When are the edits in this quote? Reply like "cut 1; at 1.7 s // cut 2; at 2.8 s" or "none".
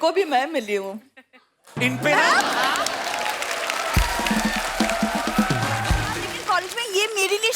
cut 1; at 6.3 s